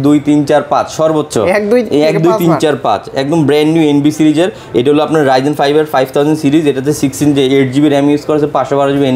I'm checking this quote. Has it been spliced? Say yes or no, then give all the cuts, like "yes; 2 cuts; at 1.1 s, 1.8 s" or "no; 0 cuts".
no; 0 cuts